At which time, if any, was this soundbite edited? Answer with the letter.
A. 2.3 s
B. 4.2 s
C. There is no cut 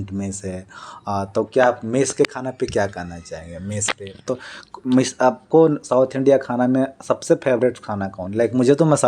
B